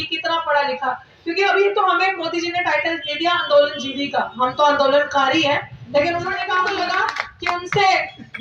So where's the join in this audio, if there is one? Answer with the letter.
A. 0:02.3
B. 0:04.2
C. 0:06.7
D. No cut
C